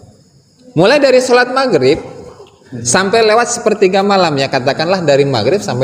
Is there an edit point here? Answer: no; 0 cuts

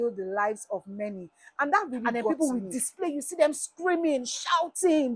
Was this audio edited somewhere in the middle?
yes; 1 cut; at 2.1 s

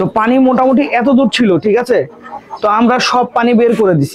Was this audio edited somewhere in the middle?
no; 0 cuts

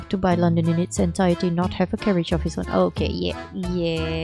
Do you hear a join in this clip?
no; 0 cuts

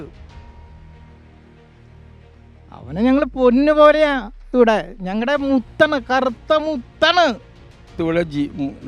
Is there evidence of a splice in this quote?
yes; 1 cut; at 7.9 s

